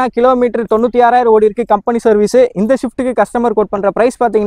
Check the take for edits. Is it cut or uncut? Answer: uncut